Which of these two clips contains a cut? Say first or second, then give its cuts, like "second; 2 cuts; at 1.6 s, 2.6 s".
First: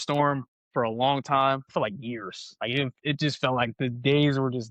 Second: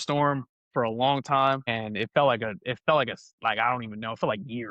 first; 1 cut; at 1.6 s